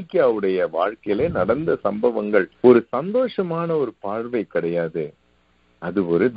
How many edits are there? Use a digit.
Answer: 1